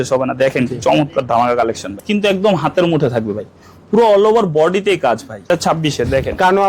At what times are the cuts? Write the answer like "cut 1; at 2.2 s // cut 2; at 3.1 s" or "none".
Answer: cut 1; at 2.0 s // cut 2; at 5.5 s